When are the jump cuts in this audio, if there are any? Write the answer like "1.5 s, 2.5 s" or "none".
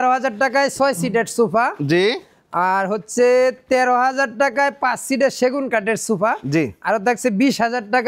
none